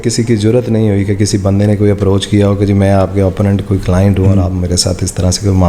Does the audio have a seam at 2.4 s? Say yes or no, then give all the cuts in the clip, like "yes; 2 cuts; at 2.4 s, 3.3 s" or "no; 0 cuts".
no; 0 cuts